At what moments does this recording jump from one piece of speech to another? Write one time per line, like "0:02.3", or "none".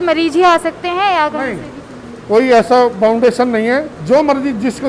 none